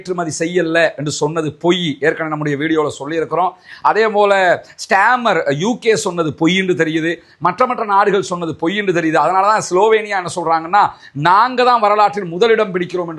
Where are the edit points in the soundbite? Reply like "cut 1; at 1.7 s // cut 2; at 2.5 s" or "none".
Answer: none